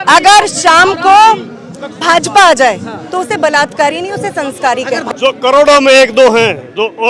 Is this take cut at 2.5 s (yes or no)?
no